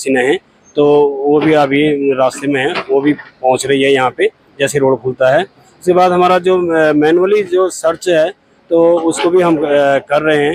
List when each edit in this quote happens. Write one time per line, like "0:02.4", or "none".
none